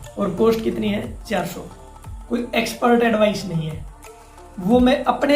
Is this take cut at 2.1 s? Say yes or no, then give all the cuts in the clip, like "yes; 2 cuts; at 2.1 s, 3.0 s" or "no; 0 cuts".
yes; 1 cut; at 2.1 s